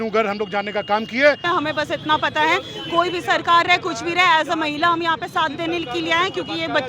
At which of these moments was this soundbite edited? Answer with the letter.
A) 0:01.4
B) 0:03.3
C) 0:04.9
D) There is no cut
A